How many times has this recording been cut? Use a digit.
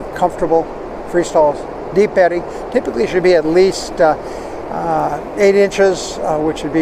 0